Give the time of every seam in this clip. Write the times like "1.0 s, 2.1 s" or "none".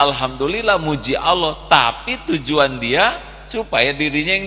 none